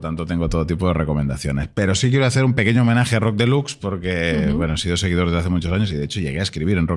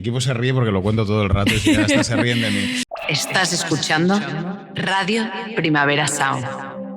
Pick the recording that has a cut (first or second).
second